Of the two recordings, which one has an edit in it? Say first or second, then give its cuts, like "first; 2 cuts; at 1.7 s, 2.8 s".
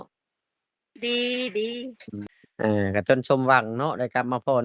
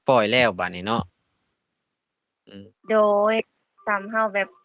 first; 1 cut; at 2.1 s